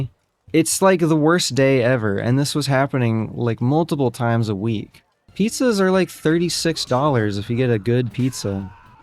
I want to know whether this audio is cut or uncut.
cut